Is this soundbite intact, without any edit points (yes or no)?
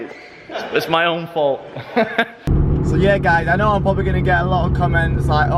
yes